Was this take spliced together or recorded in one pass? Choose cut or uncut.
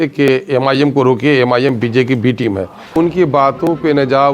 cut